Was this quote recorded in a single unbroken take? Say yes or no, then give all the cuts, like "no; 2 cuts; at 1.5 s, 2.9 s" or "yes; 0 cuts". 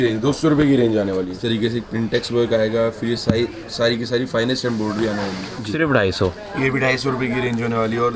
no; 2 cuts; at 1.4 s, 5.7 s